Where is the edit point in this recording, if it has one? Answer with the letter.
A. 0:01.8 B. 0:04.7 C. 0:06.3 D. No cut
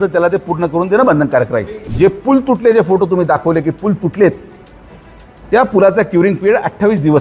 A